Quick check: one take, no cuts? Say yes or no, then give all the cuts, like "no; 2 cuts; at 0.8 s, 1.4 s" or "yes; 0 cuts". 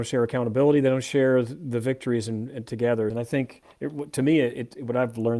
no; 1 cut; at 3.1 s